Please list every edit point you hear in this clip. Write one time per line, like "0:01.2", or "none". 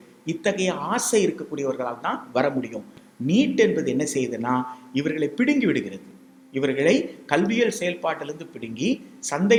none